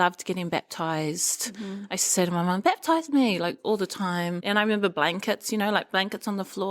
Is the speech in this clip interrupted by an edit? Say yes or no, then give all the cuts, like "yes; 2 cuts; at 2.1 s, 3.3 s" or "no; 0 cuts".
yes; 1 cut; at 4.4 s